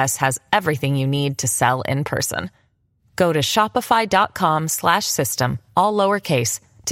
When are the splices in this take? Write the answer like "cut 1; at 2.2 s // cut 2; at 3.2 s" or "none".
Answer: none